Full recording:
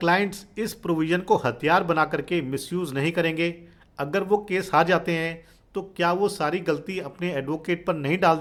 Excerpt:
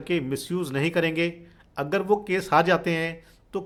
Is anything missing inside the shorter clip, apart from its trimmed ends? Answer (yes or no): no